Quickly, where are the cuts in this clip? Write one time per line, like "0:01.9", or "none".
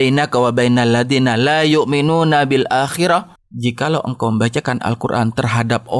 0:03.4